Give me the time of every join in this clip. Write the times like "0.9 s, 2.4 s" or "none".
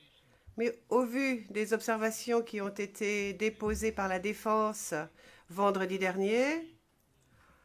6.0 s

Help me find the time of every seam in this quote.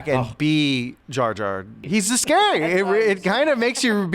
1.4 s

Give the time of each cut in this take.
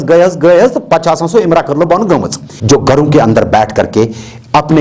2.5 s

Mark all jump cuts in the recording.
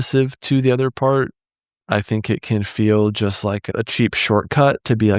3.7 s

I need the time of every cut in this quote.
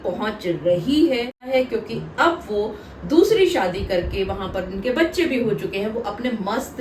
1.5 s

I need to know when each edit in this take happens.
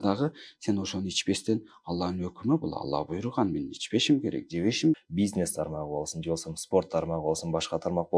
5.0 s

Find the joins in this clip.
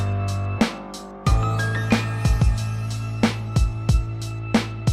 1.1 s

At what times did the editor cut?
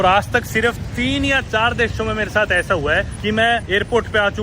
3.4 s

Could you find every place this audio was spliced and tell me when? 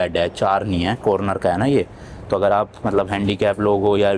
none

